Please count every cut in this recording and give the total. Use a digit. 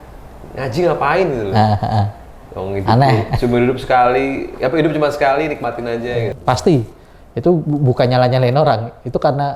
1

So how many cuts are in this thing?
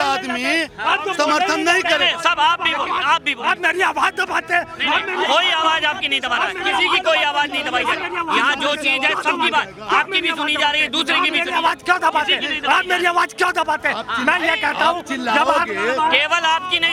0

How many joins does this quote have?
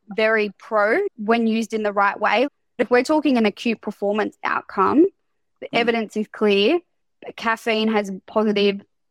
1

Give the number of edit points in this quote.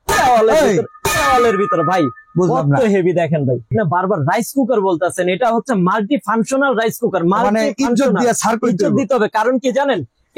1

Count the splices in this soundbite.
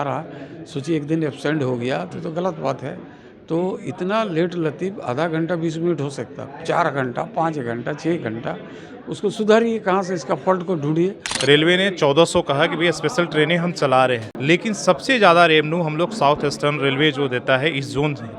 2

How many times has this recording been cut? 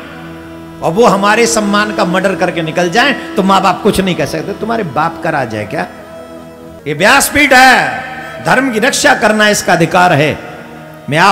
1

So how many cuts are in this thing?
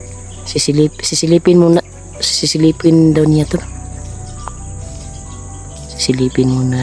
2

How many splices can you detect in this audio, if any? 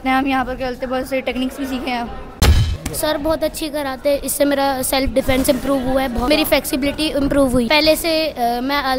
3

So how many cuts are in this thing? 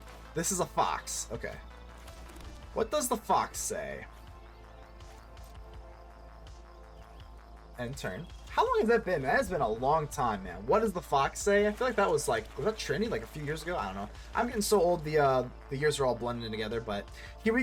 0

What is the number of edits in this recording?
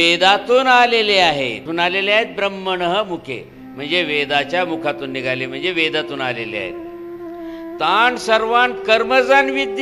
1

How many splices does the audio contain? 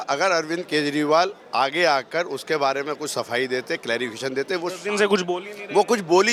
0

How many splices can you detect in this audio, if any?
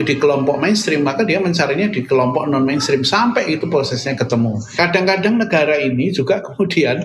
1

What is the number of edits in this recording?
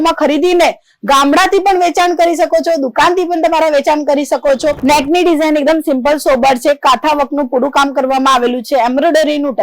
1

